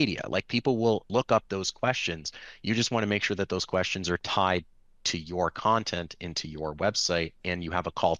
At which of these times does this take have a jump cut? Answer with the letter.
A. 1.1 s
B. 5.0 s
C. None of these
A